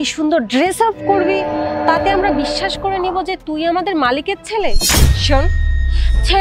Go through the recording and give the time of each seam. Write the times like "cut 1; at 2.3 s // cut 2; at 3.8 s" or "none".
none